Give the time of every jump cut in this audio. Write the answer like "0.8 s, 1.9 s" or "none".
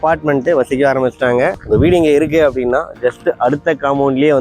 1.6 s